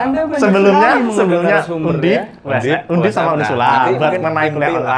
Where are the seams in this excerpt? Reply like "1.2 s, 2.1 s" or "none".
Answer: none